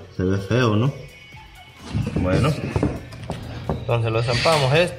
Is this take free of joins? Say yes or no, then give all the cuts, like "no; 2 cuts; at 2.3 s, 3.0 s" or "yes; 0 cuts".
no; 1 cut; at 3.1 s